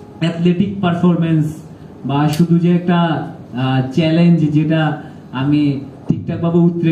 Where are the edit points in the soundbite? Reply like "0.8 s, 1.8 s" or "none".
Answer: none